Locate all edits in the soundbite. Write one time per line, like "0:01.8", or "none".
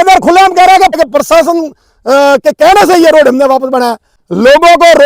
0:01.0
0:04.2